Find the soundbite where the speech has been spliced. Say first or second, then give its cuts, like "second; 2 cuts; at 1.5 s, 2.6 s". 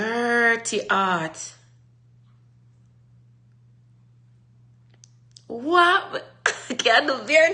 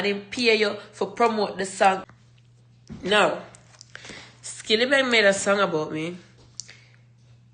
second; 1 cut; at 2.1 s